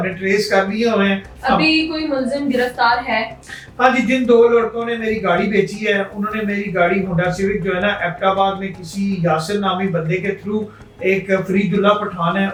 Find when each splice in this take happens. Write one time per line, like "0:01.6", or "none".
none